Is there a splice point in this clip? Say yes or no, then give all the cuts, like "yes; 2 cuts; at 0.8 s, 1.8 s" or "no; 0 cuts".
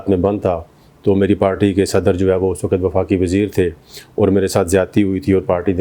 no; 0 cuts